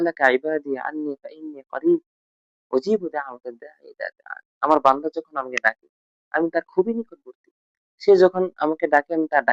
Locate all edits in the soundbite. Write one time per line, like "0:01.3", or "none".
none